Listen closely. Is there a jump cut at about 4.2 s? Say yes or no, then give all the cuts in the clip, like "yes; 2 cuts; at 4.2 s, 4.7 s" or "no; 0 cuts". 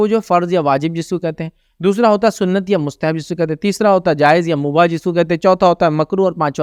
no; 0 cuts